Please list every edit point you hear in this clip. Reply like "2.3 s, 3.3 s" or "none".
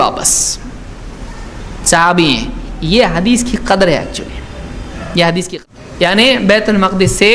5.5 s